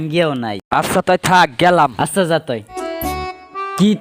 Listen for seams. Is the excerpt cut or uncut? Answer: cut